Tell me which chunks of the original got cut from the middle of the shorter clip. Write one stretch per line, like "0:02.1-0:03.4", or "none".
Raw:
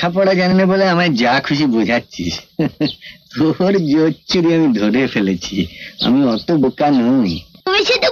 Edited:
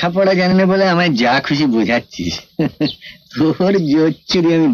none